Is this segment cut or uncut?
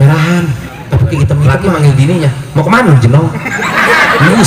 cut